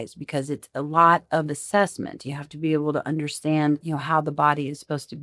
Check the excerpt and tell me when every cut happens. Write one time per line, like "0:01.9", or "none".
0:03.8